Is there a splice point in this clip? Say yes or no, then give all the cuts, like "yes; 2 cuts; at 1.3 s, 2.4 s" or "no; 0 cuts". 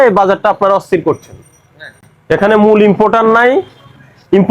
no; 0 cuts